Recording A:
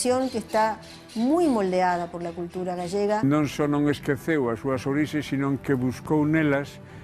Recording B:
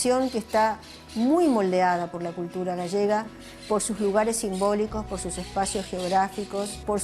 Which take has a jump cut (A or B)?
A